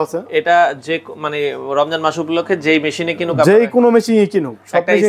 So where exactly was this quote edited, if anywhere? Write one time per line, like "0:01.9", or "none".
none